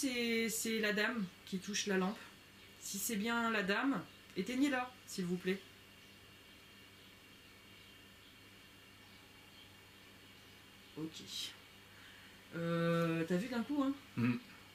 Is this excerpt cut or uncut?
uncut